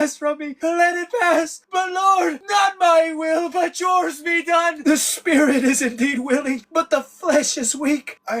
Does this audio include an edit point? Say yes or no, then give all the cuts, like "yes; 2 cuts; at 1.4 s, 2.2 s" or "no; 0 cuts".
yes; 1 cut; at 4.8 s